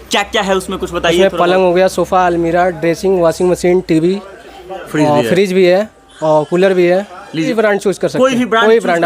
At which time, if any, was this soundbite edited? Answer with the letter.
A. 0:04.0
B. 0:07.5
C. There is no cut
B